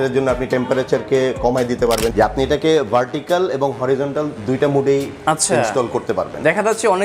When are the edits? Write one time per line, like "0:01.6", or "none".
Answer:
0:02.1